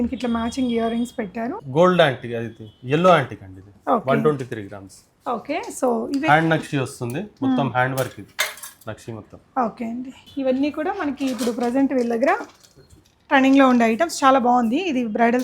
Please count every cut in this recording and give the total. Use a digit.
2